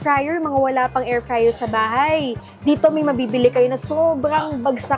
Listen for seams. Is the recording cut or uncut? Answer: uncut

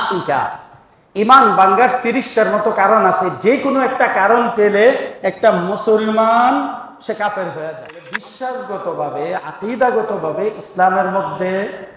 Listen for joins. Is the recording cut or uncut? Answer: cut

